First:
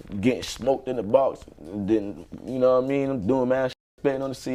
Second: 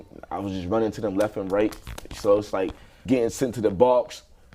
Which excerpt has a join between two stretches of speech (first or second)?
second